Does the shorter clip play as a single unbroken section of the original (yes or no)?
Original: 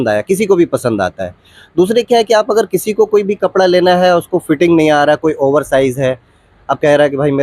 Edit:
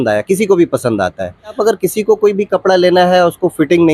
no